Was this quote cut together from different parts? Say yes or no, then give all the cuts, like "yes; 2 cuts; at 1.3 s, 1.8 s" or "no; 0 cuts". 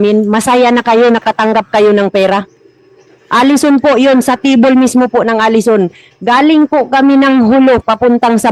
no; 0 cuts